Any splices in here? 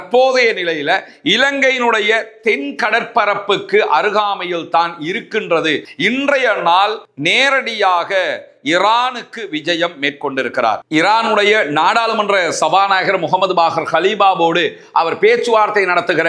yes; 1 cut; at 5.9 s

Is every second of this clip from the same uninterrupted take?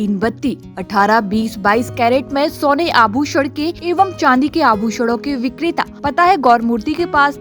no; 2 cuts; at 3.8 s, 5.9 s

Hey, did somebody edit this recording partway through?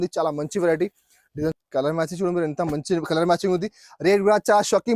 yes; 1 cut; at 1.6 s

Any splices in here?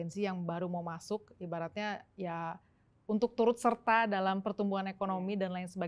no; 0 cuts

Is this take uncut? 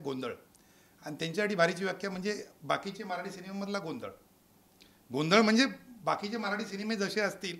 yes; 0 cuts

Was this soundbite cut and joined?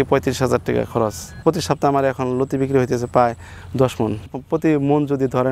yes; 1 cut; at 1.4 s

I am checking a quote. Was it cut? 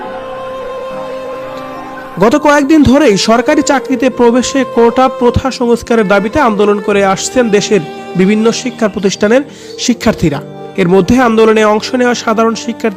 no; 0 cuts

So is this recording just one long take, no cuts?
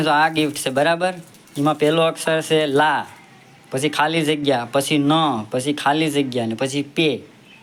yes; 0 cuts

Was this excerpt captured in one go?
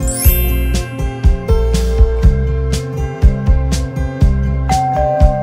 yes; 0 cuts

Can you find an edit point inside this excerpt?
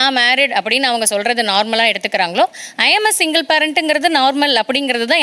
no; 0 cuts

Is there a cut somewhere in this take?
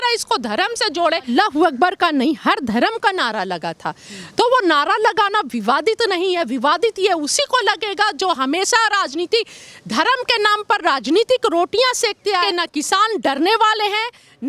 yes; 2 cuts; at 1.3 s, 12.5 s

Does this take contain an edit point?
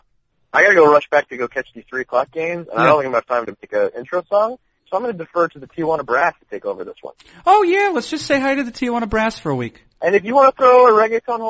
yes; 1 cut; at 10.0 s

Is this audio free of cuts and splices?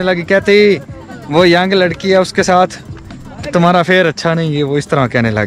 yes; 0 cuts

